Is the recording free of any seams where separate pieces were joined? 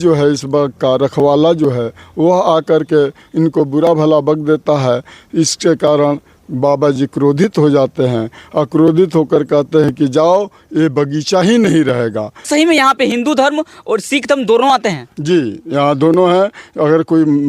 no; 1 cut; at 12.5 s

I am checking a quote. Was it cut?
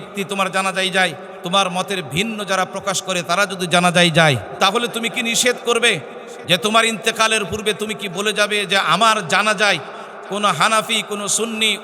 yes; 2 cuts; at 1.3 s, 4.5 s

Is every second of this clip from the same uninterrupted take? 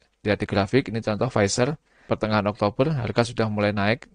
no; 1 cut; at 1.9 s

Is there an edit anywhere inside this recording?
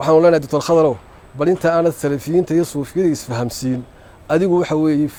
no; 0 cuts

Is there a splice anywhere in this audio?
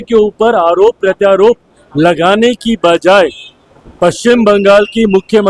no; 0 cuts

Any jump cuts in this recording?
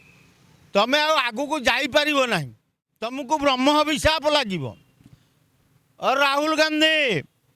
yes; 1 cut; at 3.2 s

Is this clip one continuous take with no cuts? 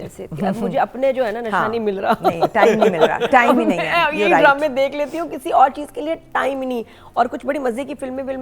yes; 0 cuts

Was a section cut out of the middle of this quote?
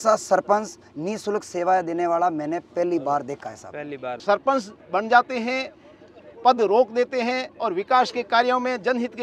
yes; 1 cut; at 4.1 s

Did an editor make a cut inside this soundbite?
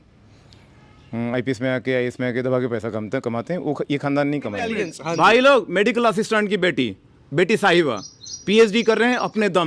yes; 1 cut; at 4.9 s

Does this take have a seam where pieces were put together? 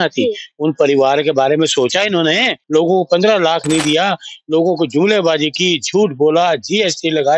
yes; 1 cut; at 2.5 s

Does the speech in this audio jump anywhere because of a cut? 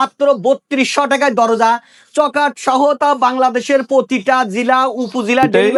no; 0 cuts

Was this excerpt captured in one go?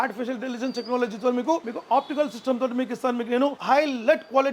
no; 1 cut; at 3.6 s

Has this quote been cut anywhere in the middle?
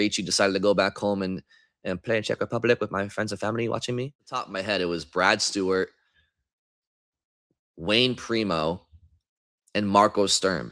yes; 1 cut; at 4.5 s

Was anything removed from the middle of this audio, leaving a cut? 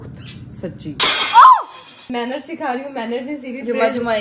yes; 2 cuts; at 0.9 s, 2.0 s

